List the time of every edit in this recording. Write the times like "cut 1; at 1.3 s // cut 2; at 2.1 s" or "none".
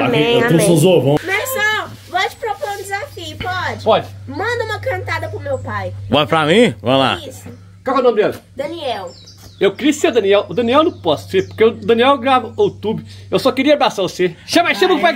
cut 1; at 1.2 s